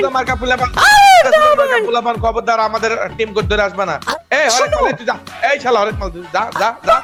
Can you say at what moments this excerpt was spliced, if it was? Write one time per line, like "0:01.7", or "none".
none